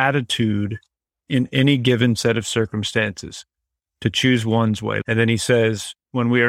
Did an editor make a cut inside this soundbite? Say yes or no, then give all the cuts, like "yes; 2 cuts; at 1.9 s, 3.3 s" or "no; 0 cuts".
yes; 1 cut; at 5.0 s